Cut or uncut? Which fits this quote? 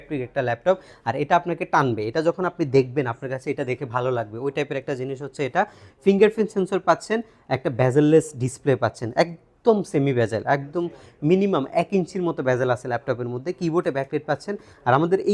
uncut